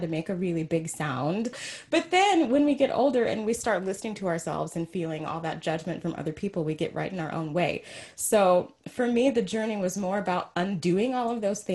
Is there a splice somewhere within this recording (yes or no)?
yes